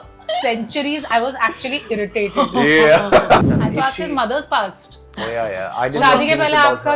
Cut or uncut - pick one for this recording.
cut